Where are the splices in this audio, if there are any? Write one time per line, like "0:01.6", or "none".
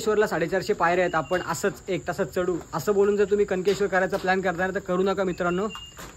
none